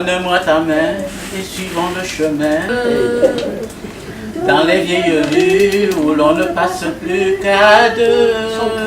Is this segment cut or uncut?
cut